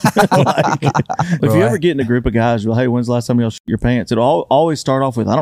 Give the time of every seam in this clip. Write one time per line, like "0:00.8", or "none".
0:01.4